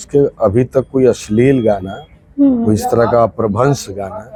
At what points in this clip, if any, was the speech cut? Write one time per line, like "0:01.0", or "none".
none